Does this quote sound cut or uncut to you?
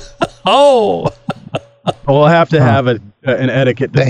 uncut